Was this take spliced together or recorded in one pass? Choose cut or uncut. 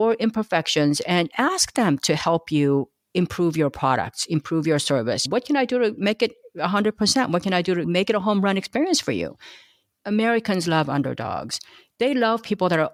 uncut